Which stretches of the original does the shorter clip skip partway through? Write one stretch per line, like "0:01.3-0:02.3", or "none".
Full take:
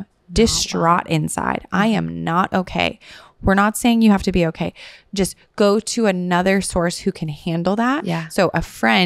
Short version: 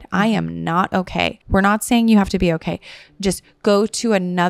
0:03.0-0:03.3